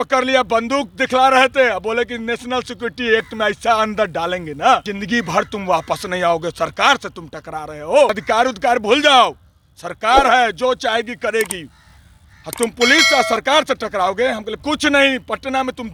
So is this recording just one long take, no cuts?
yes; 0 cuts

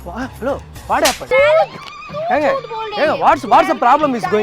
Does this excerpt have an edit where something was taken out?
yes; 1 cut; at 1.2 s

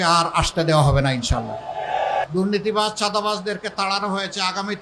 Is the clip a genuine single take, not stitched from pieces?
no; 1 cut; at 2.2 s

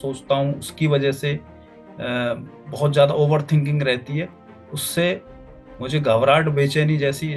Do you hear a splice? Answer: no; 0 cuts

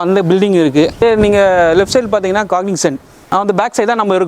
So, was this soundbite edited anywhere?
yes; 2 cuts; at 1.0 s, 3.1 s

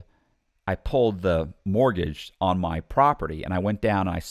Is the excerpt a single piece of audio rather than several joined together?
yes; 0 cuts

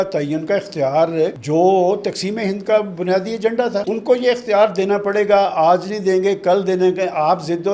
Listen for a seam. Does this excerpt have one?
yes; 2 cuts; at 1.4 s, 3.9 s

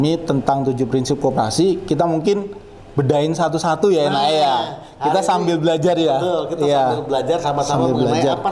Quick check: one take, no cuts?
yes; 0 cuts

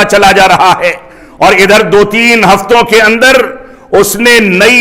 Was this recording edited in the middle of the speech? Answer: no; 0 cuts

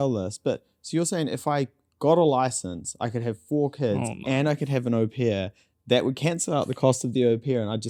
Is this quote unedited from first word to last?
yes; 0 cuts

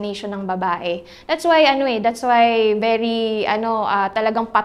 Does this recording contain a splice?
no; 0 cuts

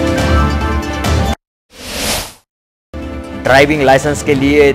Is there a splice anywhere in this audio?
yes; 2 cuts; at 1.3 s, 3.3 s

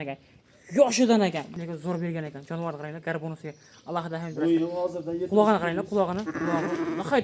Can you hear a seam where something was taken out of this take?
yes; 1 cut; at 1.5 s

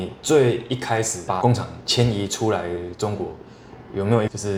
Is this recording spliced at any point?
no; 0 cuts

